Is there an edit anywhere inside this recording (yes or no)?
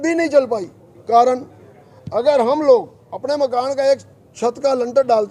no